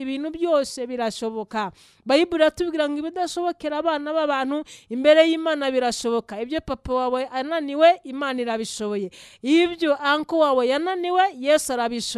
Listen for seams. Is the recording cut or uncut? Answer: uncut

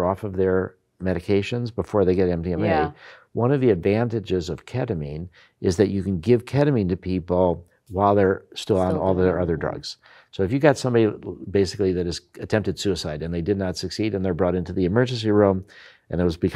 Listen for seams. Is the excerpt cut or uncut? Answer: uncut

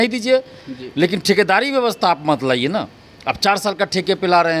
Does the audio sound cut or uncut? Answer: uncut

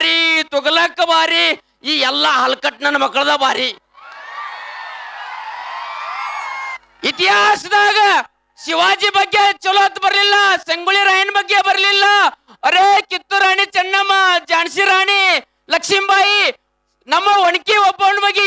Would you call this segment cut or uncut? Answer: uncut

